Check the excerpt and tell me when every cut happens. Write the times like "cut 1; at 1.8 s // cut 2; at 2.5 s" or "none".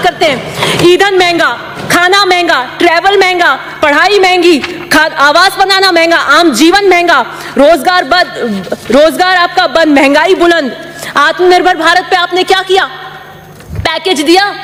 none